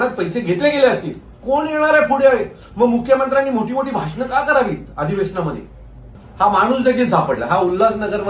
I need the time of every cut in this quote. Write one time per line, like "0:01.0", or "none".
0:01.4
0:06.2

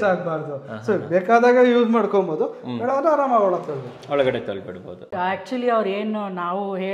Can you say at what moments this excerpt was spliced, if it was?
0:05.1

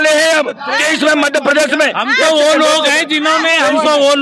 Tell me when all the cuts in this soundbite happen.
none

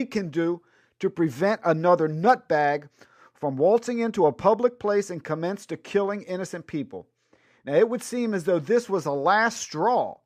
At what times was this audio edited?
0:01.3

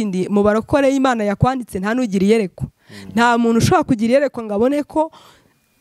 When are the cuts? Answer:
none

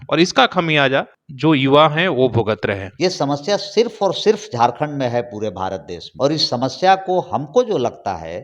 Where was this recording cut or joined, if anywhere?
0:01.2
0:02.9
0:06.0

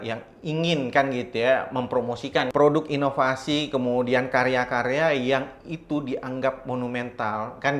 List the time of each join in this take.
0:02.5

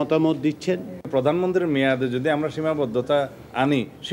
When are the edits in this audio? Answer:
0:00.9

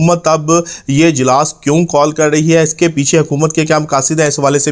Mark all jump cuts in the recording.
none

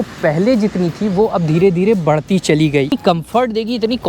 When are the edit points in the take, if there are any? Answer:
0:02.9

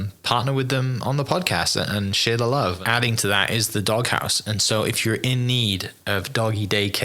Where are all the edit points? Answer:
0:02.8

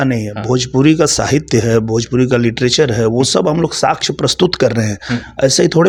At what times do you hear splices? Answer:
none

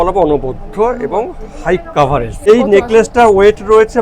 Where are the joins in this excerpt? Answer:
0:02.5

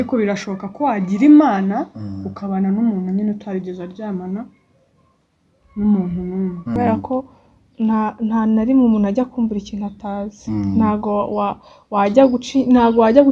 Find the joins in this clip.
0:06.8

